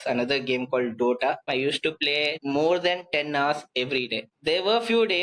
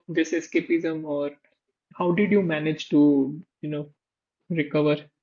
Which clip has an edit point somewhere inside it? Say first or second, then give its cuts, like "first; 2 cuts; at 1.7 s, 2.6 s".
first; 3 cuts; at 1.5 s, 2.4 s, 4.3 s